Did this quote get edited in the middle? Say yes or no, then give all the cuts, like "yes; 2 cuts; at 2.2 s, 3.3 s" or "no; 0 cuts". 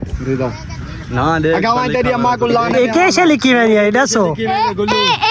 no; 0 cuts